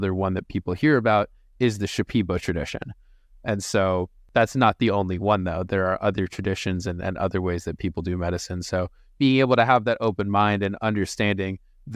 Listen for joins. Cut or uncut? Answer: cut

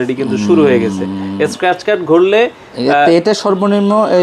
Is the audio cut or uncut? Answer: uncut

